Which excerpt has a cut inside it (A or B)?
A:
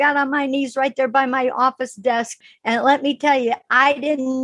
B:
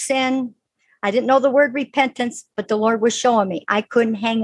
A